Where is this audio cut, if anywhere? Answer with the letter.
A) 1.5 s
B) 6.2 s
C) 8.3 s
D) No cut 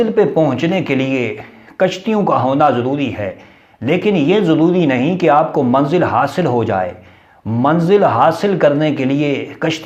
D